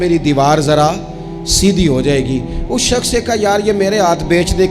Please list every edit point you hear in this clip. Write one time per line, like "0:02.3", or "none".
none